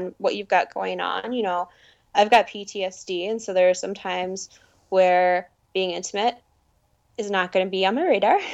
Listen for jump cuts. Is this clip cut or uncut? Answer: uncut